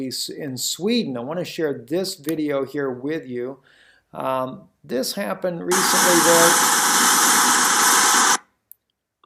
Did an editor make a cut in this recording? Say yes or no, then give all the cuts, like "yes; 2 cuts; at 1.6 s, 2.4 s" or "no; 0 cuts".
yes; 1 cut; at 4.3 s